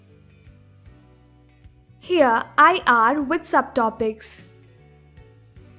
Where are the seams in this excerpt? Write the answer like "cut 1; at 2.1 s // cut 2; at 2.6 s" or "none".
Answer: cut 1; at 1.6 s // cut 2; at 4.3 s